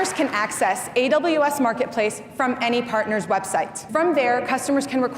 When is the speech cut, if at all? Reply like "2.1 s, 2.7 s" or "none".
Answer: 3.9 s